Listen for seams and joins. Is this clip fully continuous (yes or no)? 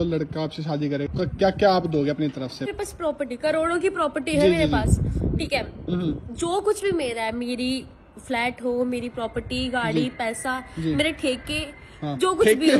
no